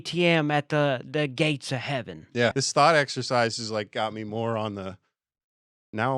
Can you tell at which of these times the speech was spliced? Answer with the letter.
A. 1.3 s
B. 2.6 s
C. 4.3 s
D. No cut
B